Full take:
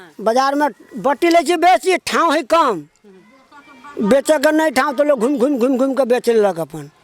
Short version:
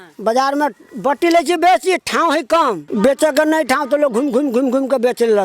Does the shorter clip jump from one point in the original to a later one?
yes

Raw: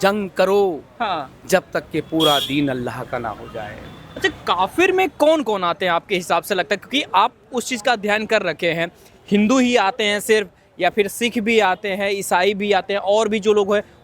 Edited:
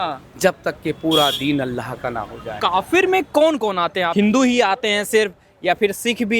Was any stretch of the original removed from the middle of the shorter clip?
yes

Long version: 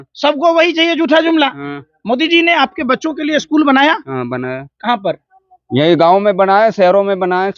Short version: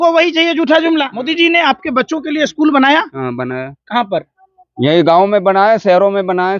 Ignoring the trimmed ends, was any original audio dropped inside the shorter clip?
yes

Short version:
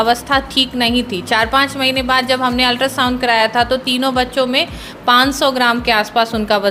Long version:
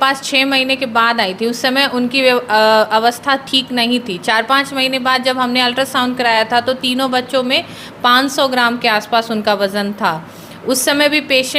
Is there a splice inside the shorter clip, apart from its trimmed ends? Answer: no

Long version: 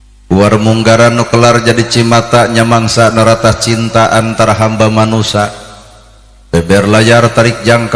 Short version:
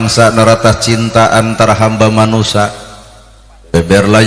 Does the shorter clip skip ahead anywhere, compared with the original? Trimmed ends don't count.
no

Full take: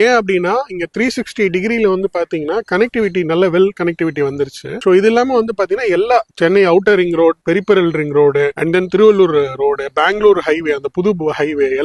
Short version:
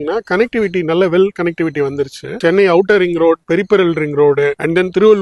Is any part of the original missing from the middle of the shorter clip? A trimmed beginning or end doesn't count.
yes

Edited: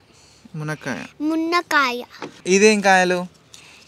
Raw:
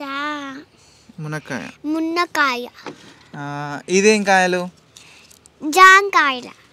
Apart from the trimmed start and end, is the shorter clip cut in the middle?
yes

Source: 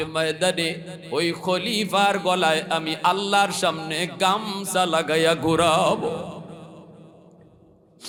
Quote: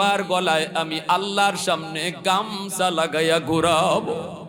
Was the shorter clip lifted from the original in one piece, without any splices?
yes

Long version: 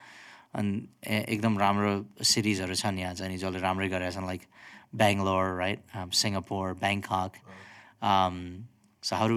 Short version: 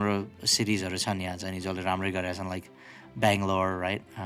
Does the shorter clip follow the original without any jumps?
yes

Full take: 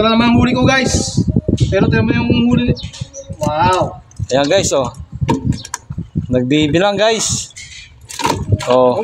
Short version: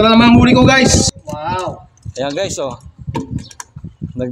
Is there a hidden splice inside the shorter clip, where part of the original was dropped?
yes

